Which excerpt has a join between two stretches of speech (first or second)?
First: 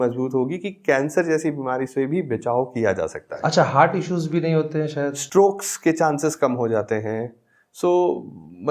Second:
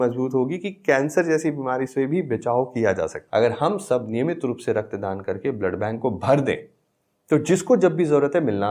second